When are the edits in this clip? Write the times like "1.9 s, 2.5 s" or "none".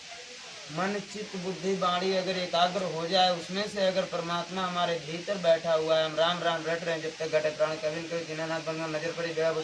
none